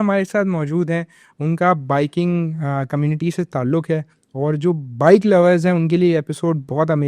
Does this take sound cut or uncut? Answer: uncut